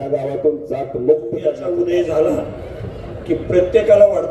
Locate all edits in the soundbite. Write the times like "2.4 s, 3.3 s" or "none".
1.6 s